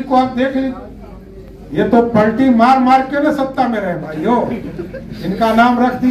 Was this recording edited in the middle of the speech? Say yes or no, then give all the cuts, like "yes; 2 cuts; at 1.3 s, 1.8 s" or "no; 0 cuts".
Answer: no; 0 cuts